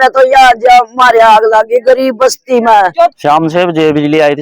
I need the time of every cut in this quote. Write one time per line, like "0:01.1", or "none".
0:03.1